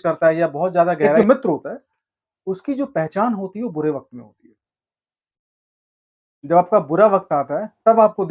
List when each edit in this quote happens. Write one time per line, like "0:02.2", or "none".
0:01.2

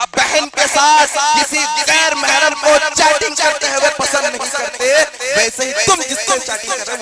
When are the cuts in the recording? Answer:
none

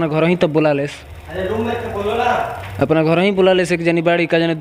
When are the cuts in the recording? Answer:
none

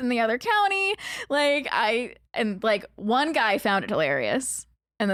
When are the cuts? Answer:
none

